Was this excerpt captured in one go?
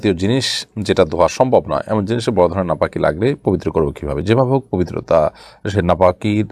yes; 0 cuts

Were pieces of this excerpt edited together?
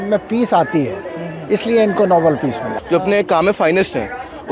yes; 1 cut; at 2.8 s

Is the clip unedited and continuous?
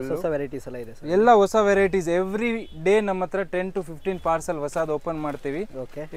yes; 0 cuts

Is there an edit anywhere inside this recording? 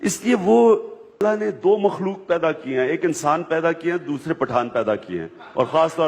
yes; 1 cut; at 1.2 s

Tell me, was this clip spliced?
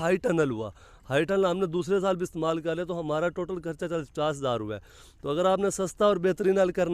no; 0 cuts

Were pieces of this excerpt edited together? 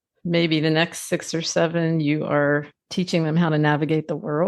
yes; 1 cut; at 2.8 s

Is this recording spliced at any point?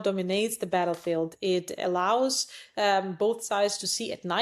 no; 0 cuts

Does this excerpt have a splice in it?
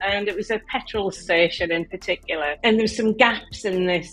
yes; 1 cut; at 2.5 s

